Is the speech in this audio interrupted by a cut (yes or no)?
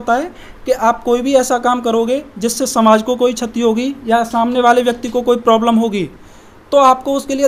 no